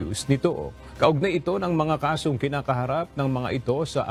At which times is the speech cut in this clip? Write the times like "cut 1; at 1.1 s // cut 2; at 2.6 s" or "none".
cut 1; at 1.5 s